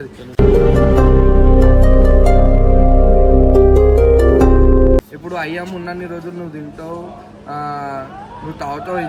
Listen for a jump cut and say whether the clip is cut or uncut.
uncut